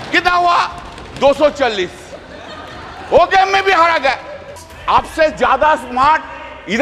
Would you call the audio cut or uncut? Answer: cut